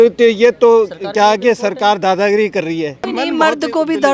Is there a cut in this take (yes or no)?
yes